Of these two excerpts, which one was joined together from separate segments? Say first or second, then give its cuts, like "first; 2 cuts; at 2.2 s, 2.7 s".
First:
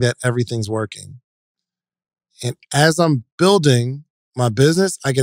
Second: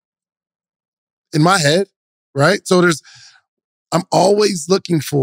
first; 1 cut; at 1.6 s